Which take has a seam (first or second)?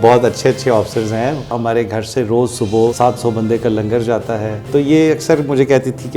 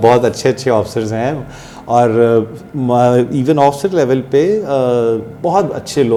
first